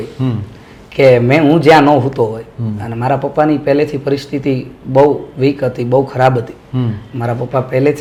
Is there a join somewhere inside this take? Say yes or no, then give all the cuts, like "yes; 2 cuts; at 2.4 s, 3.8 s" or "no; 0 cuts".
no; 0 cuts